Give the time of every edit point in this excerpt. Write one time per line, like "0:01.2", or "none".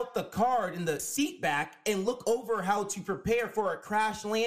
0:01.0